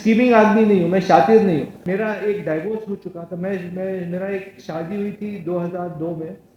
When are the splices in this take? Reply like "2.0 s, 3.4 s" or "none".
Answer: 1.8 s